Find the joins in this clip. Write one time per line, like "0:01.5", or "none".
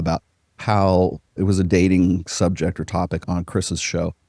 0:01.4
0:03.2